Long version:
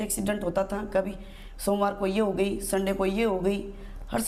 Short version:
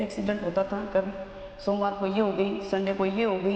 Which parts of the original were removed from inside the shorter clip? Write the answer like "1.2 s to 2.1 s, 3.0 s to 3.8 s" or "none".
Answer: none